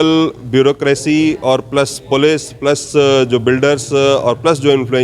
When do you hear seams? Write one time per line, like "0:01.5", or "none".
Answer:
none